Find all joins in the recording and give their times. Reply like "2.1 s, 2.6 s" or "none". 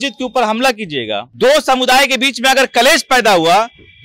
1.3 s